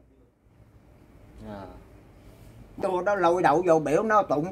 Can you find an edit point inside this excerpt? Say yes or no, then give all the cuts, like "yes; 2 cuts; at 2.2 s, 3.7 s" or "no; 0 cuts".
yes; 1 cut; at 2.6 s